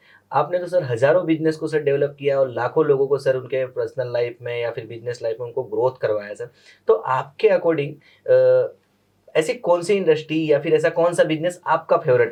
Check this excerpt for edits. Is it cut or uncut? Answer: uncut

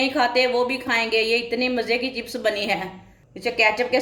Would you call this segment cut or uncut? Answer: cut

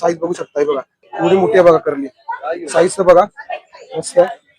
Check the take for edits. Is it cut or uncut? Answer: cut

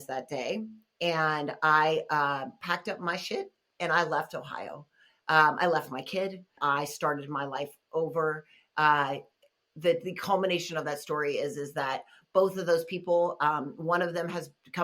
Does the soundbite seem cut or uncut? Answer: cut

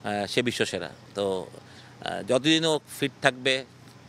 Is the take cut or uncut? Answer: uncut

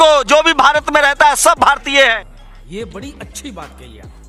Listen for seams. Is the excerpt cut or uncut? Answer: uncut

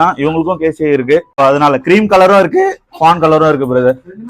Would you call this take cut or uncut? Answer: cut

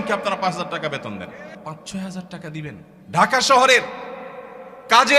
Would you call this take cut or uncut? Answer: cut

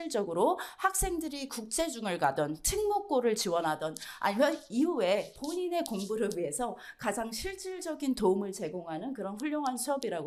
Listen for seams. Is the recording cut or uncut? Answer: uncut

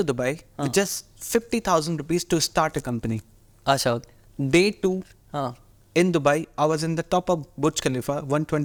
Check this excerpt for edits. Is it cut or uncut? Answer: uncut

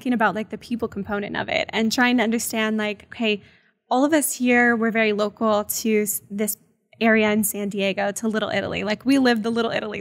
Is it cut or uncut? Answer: uncut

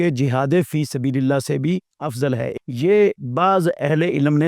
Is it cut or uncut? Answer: cut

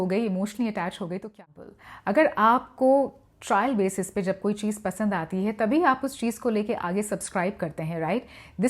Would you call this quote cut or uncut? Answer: cut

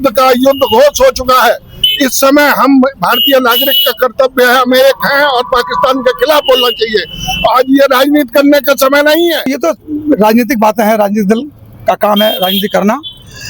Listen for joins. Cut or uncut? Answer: cut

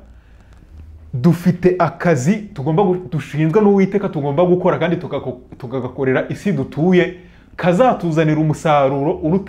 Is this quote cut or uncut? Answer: uncut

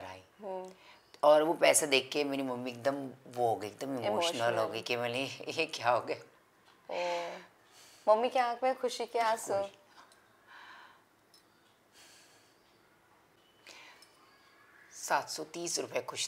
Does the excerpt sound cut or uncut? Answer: cut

